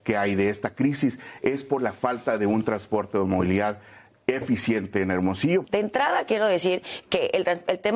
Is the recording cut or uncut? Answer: cut